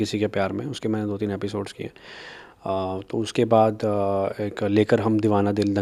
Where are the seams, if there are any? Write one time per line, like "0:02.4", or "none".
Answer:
none